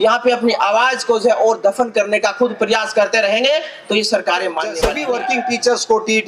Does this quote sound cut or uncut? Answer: cut